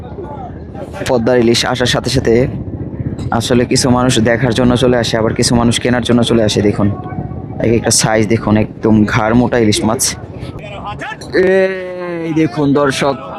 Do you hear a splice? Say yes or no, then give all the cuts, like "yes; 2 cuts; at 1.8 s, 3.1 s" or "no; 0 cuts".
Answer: yes; 1 cut; at 10.6 s